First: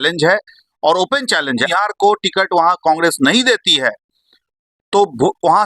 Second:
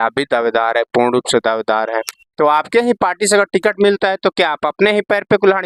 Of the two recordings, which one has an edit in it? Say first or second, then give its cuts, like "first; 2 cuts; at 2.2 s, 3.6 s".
first; 1 cut; at 1.7 s